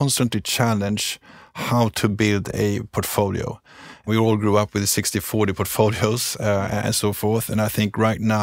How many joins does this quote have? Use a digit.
1